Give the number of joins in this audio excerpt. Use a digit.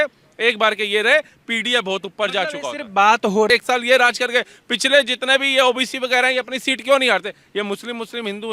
1